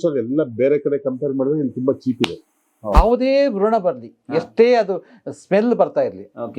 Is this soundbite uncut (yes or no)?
no